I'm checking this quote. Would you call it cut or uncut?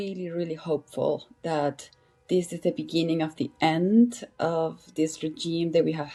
uncut